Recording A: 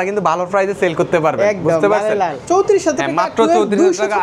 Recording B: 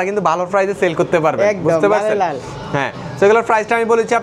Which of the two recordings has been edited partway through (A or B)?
A